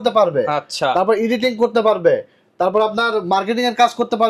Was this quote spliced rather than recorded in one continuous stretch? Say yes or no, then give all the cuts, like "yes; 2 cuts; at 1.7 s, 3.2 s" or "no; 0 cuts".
no; 0 cuts